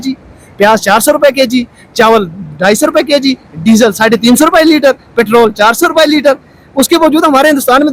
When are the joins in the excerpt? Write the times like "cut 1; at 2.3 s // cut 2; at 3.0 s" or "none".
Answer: none

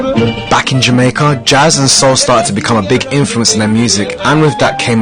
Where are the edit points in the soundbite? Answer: none

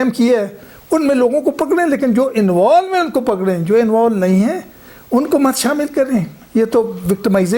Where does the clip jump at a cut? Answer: none

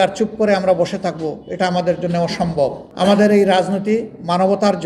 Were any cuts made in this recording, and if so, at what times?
cut 1; at 2.8 s

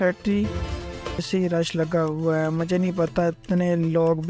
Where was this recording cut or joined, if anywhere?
cut 1; at 1.2 s

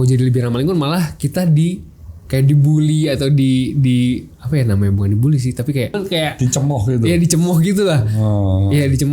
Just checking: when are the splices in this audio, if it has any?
cut 1; at 6.0 s

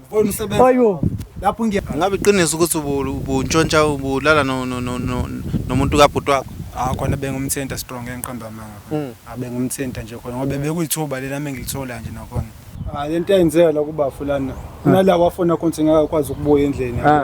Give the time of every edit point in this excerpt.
cut 1; at 1.8 s // cut 2; at 12.7 s

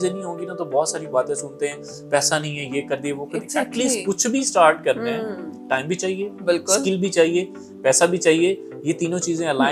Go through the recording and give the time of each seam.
none

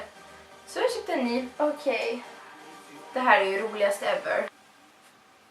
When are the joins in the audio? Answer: cut 1; at 3.0 s

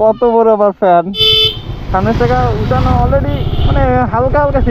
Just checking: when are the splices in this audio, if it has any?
cut 1; at 1.2 s

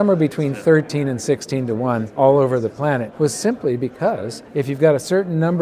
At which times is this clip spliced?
cut 1; at 2.1 s // cut 2; at 3.1 s // cut 3; at 4.4 s

